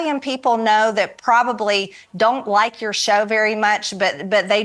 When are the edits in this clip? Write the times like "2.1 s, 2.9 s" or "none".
none